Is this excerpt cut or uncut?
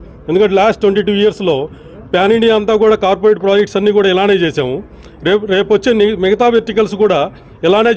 uncut